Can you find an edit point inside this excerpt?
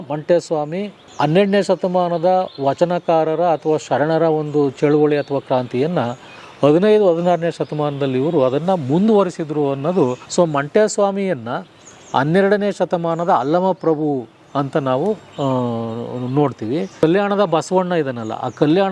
yes; 2 cuts; at 10.2 s, 16.9 s

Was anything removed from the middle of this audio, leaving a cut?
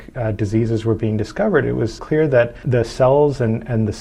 yes; 1 cut; at 2.1 s

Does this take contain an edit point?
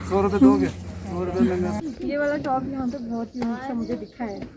yes; 1 cut; at 1.8 s

